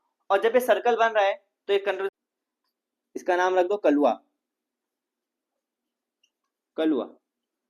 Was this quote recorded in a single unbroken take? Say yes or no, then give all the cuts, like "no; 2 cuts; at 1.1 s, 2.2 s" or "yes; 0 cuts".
no; 1 cut; at 2.1 s